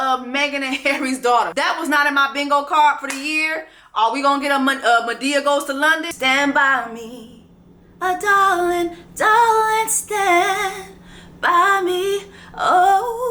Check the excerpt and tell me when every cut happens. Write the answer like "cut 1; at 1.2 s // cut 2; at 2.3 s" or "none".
cut 1; at 1.5 s // cut 2; at 6.1 s